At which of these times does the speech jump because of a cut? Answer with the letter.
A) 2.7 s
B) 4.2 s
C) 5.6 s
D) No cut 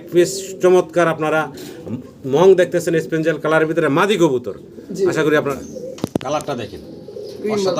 C